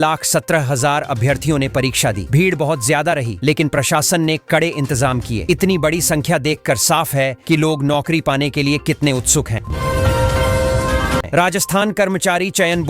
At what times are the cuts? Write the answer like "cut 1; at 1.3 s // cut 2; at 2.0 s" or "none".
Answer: cut 1; at 9.7 s // cut 2; at 11.3 s

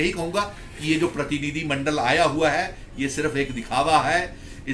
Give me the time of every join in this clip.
none

